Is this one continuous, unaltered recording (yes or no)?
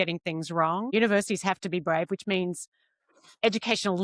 no